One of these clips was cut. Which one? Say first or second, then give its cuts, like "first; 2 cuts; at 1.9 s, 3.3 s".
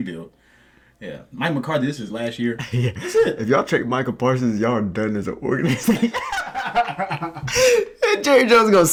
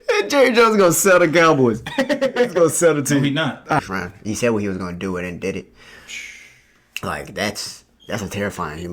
second; 1 cut; at 3.8 s